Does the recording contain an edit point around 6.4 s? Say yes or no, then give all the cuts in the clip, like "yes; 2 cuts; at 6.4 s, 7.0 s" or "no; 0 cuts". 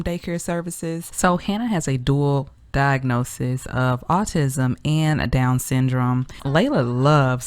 yes; 2 cuts; at 1.1 s, 6.4 s